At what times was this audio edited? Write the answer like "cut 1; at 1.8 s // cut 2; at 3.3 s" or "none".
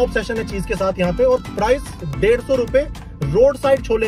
none